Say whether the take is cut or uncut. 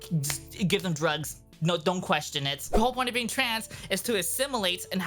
cut